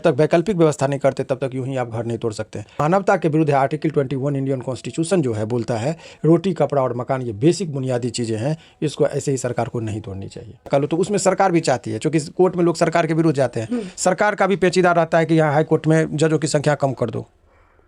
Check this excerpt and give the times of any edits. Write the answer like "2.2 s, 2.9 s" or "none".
2.8 s, 10.7 s